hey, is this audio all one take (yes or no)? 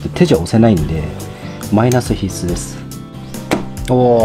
no